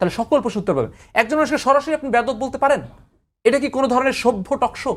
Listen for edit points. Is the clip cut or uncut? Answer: uncut